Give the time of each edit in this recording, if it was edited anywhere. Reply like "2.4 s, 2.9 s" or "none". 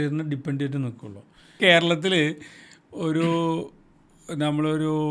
1.6 s